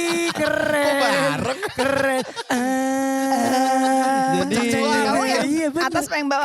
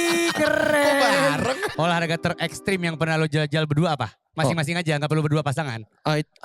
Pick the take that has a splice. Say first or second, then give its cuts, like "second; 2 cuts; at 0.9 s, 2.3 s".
second; 1 cut; at 1.7 s